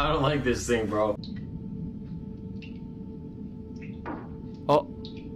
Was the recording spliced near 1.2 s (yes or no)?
yes